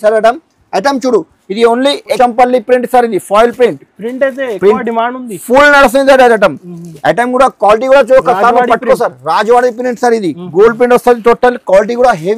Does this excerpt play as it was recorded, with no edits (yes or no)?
no